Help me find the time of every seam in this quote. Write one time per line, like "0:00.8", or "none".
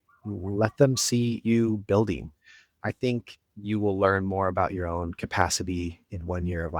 0:02.7

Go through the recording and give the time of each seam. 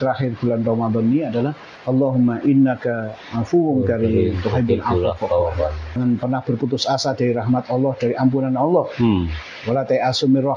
0:01.7
0:06.0

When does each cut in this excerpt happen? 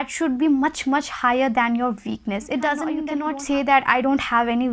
0:03.1

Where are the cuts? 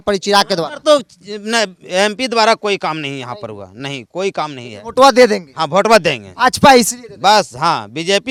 none

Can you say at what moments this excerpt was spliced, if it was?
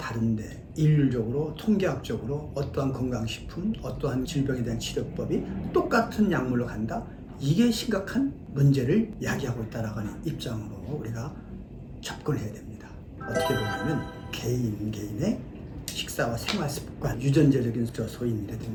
none

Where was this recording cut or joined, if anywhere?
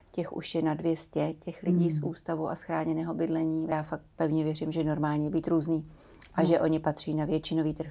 0:03.7

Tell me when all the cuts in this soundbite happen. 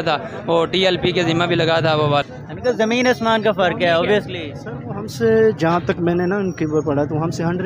0:02.2

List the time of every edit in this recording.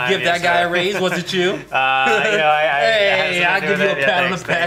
none

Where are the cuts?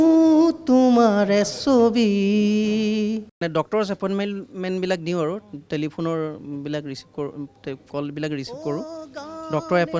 0:03.4

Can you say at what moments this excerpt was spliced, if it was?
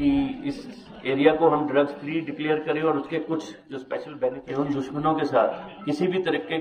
0:04.4

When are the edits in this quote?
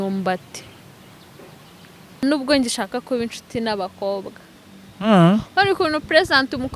0:02.2

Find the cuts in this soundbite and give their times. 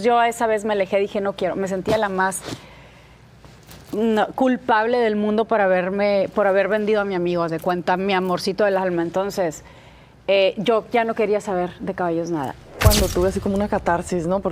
0:12.7

